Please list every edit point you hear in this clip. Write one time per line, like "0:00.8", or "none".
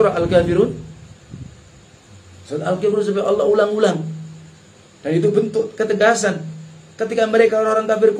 none

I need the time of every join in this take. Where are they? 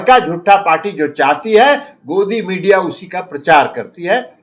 none

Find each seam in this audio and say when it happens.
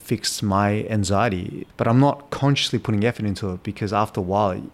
0:01.7

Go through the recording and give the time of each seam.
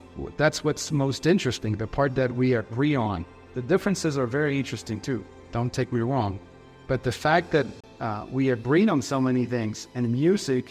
0:07.8

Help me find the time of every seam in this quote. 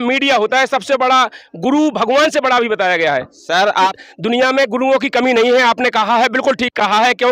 0:04.0

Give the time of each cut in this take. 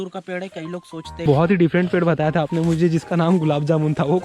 0:01.2

